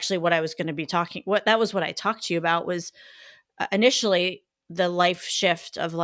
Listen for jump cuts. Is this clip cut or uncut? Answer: cut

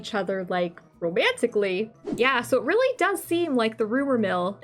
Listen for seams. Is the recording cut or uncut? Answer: cut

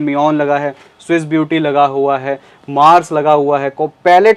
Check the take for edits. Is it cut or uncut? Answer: uncut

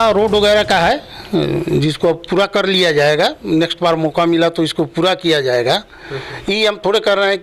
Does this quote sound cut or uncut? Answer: uncut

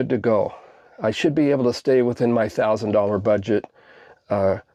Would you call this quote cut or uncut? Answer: uncut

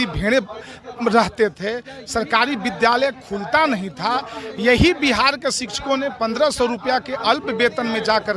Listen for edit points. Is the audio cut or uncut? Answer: uncut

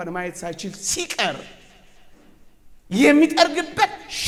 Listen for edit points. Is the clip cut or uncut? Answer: uncut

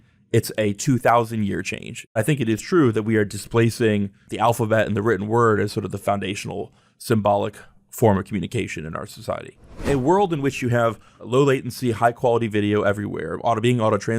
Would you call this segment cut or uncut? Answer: cut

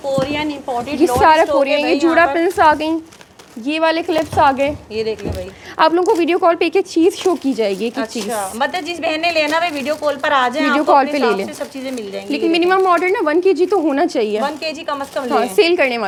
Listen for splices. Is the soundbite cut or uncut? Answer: uncut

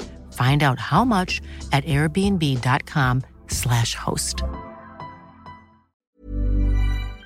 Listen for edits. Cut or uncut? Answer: cut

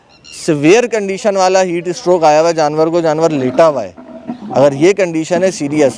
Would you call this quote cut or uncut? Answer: uncut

